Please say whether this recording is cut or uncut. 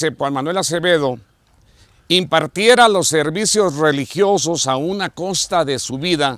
uncut